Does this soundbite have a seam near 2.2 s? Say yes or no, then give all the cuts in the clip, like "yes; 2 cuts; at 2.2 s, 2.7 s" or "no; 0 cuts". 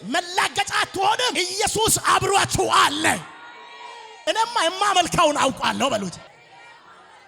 no; 1 cut; at 4.2 s